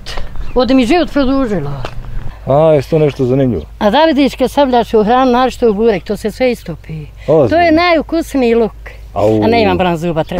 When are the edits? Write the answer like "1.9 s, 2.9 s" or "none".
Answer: 2.3 s